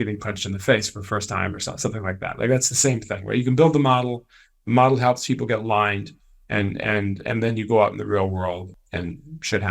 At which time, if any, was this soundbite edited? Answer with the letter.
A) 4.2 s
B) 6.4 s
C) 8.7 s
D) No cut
C